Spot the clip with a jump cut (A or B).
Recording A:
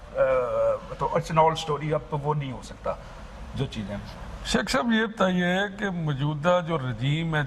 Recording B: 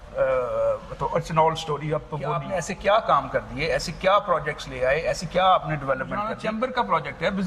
B